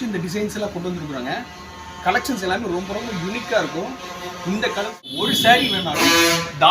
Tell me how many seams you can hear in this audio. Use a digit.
1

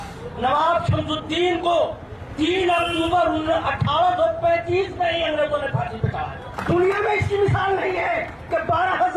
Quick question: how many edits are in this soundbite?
1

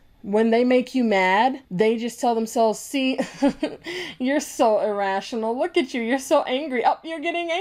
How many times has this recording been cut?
0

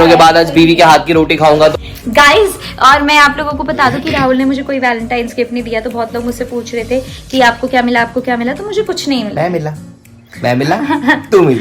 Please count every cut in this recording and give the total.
1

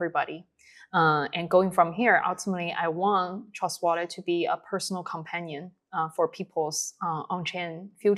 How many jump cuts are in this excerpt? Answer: 0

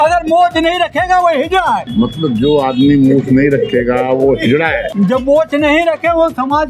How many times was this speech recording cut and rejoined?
2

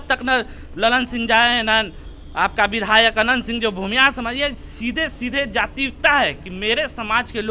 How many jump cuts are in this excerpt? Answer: 0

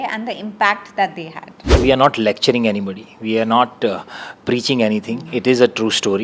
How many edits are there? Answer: 1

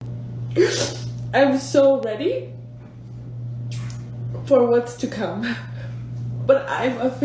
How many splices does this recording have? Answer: 0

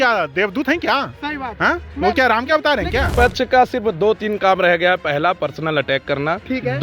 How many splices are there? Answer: 1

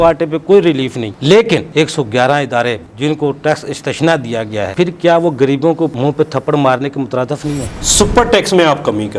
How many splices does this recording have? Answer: 4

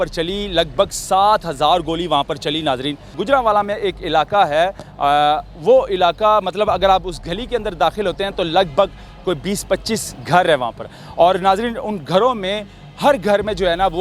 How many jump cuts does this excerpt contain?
1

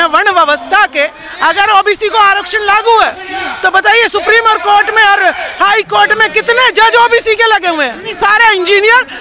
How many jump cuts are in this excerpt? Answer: 2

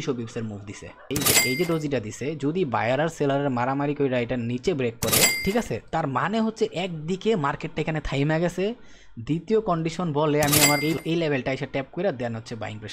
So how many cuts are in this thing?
3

